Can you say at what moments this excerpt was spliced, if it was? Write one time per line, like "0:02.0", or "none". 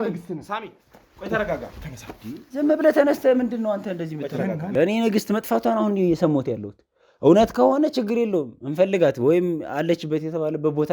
0:04.7